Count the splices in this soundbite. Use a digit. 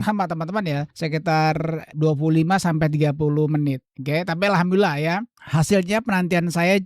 2